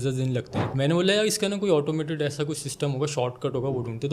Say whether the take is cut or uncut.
uncut